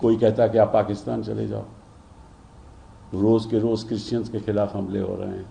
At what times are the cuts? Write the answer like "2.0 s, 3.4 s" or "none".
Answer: none